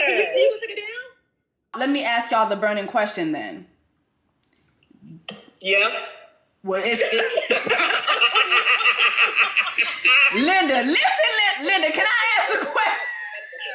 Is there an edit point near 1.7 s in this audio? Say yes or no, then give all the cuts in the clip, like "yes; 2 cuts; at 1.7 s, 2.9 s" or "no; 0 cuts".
yes; 1 cut; at 1.7 s